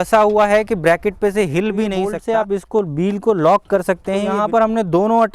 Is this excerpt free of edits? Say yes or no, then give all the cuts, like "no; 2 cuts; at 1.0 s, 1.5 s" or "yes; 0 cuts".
no; 2 cuts; at 2.1 s, 4.3 s